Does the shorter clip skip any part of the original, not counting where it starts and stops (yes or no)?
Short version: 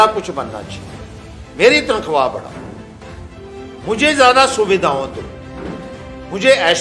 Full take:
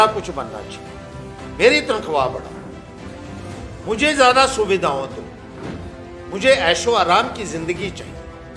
no